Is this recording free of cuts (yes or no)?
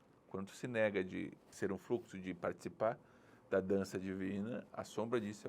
no